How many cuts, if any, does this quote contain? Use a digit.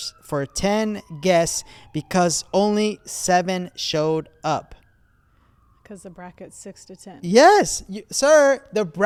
0